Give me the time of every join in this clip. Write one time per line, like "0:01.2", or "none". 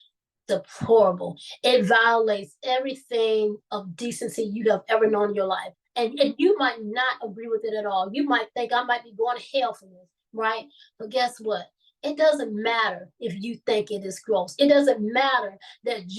0:05.7